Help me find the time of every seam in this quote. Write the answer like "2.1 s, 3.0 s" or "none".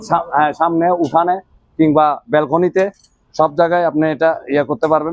none